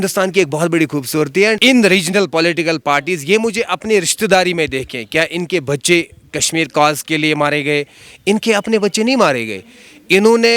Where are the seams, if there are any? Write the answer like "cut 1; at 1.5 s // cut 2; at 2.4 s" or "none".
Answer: cut 1; at 1.6 s